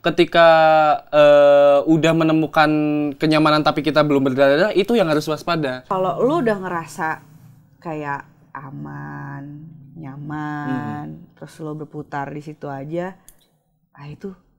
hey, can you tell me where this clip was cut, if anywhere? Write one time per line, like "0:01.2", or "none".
0:05.8